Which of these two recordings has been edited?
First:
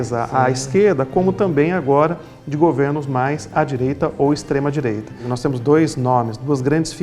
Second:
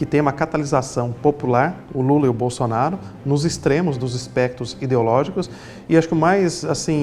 first; 1 cut; at 5.3 s

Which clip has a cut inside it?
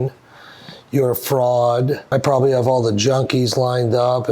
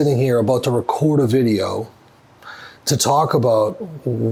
first; 1 cut; at 2.0 s

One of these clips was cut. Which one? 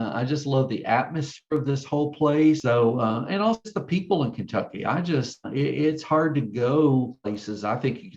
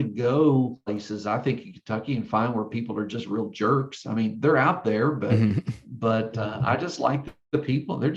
first; 1 cut; at 2.6 s

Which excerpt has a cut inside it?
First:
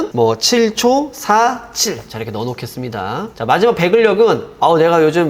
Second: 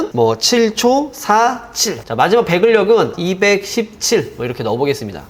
second; 2 cuts; at 2.0 s, 3.2 s

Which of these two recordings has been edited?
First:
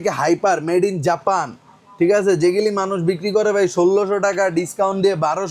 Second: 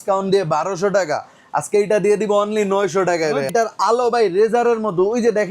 second; 1 cut; at 3.5 s

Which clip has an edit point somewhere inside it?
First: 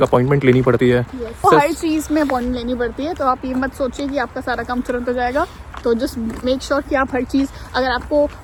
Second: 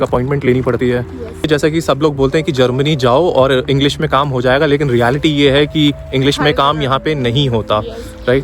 second; 1 cut; at 1.4 s

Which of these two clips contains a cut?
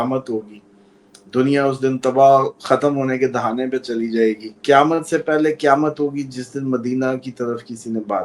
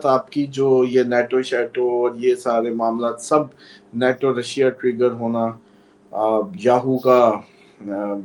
first; 1 cut; at 4.5 s

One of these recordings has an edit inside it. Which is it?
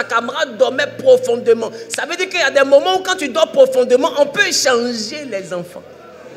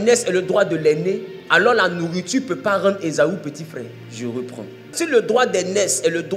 second; 3 cuts; at 1.3 s, 4.0 s, 4.9 s

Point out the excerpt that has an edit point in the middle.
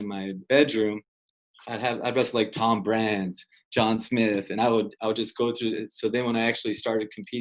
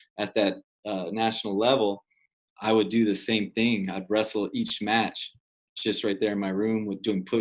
first; 1 cut; at 1.2 s

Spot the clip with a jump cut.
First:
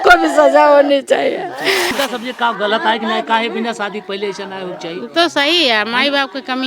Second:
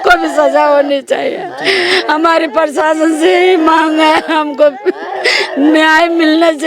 first; 1 cut; at 1.9 s

